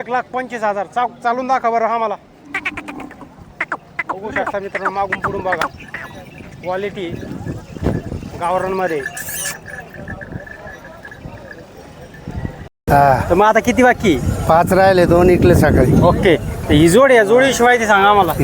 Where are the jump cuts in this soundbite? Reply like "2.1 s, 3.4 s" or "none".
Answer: 12.8 s